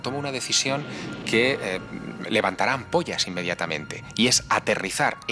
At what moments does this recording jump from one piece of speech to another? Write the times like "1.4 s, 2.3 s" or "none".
none